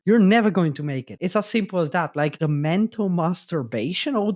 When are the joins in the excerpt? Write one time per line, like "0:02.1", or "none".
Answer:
0:01.1
0:02.4